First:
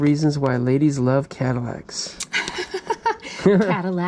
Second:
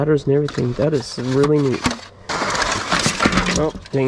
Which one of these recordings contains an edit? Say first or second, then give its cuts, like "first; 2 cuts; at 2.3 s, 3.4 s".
second; 1 cut; at 2.3 s